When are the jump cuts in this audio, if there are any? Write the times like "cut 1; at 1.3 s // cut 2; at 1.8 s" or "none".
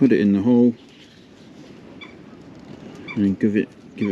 none